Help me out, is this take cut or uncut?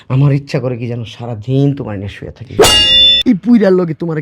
cut